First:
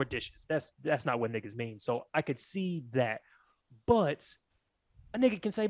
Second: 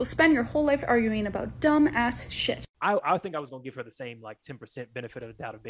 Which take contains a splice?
second; 1 cut; at 2.7 s

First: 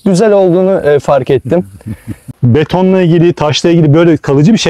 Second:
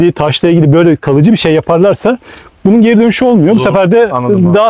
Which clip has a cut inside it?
first; 1 cut; at 2.3 s

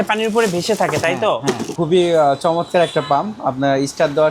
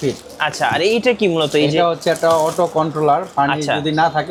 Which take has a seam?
first; 1 cut; at 1.7 s

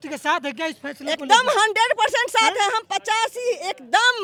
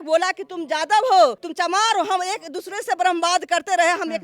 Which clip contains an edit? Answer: second; 1 cut; at 1.4 s

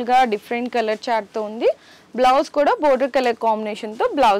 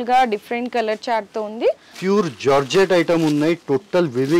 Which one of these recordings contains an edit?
second; 1 cut; at 1.9 s

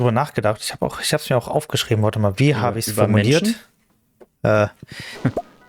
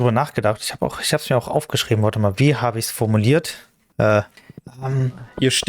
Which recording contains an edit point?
second; 2 cuts; at 3.4 s, 4.7 s

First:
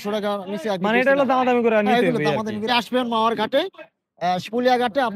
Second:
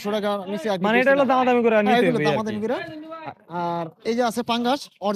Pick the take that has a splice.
first; 1 cut; at 2.7 s

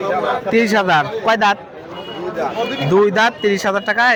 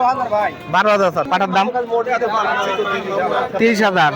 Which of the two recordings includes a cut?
second; 1 cut; at 1.3 s

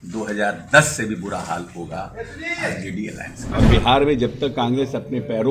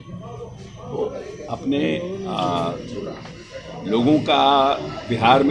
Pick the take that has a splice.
first; 1 cut; at 3.6 s

